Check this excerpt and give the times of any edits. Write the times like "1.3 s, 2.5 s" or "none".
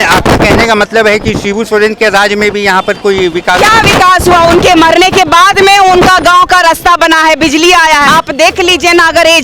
8.0 s